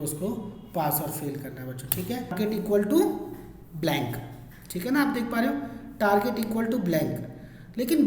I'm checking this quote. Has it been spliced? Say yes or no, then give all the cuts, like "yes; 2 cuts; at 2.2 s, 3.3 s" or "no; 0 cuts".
yes; 1 cut; at 2.3 s